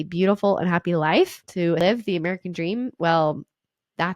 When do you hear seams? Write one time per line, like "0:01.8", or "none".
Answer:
0:01.8

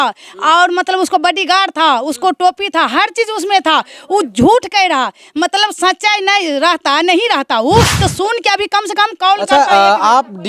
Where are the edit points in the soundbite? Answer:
0:09.5

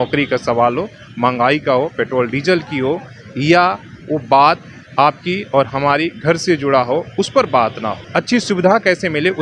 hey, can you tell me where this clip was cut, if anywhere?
0:08.0

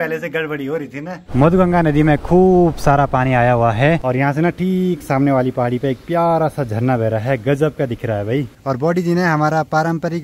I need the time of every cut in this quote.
0:01.2
0:04.0
0:08.6

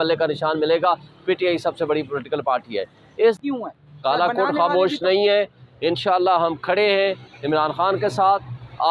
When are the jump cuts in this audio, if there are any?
0:03.4

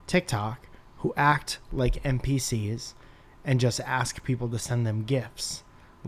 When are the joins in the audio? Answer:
none

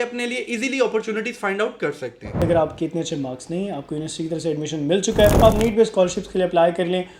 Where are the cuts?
0:02.4
0:05.4

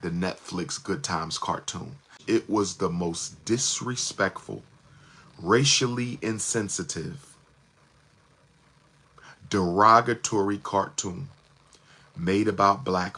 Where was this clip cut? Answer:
0:02.3

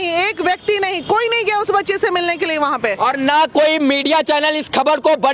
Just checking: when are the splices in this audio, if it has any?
none

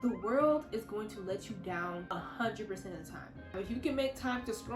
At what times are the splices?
0:02.1
0:03.5

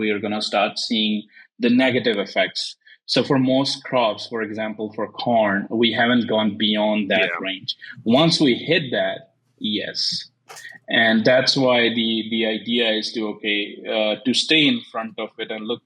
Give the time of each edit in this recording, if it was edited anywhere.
none

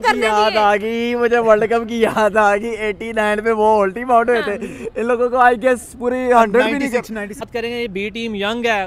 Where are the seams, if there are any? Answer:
0:07.4

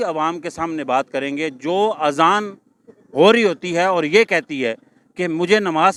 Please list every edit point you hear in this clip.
none

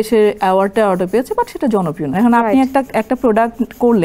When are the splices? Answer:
0:02.1

